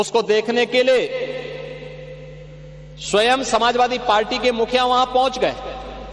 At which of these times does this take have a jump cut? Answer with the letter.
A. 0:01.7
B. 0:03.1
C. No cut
C